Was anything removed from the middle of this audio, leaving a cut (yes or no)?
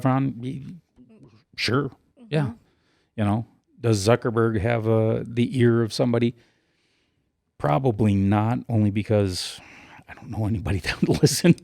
no